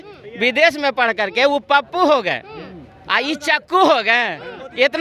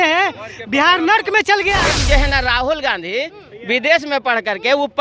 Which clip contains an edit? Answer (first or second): second